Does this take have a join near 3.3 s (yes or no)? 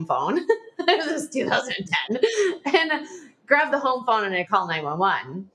no